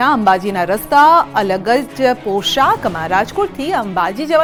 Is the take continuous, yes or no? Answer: yes